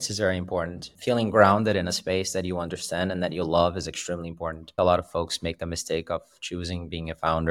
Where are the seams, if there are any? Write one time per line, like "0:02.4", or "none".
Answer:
0:00.9
0:04.7